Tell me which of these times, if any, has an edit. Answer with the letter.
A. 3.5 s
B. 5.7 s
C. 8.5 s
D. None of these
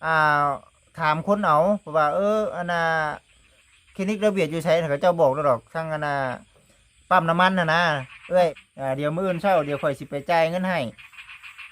C